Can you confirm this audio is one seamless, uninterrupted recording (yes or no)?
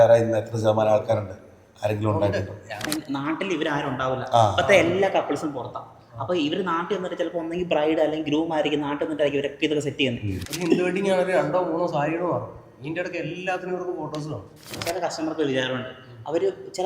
no